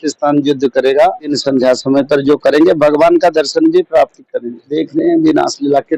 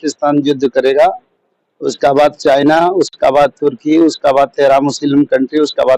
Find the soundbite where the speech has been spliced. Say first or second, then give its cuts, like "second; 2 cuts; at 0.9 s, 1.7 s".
first; 2 cuts; at 1.3 s, 4.7 s